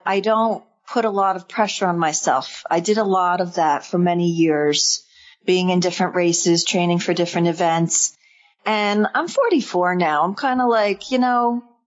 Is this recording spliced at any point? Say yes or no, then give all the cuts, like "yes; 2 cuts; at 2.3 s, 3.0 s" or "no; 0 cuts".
no; 0 cuts